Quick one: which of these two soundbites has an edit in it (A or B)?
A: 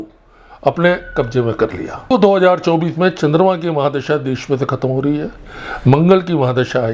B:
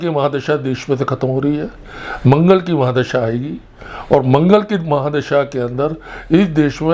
A